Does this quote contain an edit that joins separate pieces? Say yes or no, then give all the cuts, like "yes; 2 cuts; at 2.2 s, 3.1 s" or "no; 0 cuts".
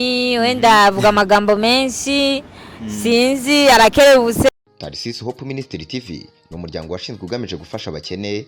yes; 1 cut; at 4.5 s